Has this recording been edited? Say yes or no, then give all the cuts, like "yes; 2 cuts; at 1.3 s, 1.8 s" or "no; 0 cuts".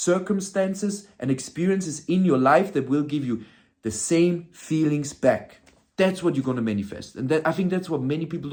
no; 0 cuts